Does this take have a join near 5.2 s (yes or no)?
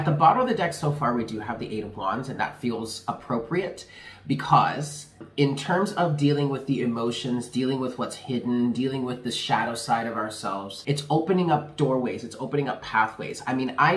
yes